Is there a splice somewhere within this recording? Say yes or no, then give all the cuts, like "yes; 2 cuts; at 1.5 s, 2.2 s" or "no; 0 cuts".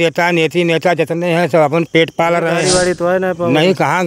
yes; 1 cut; at 2.6 s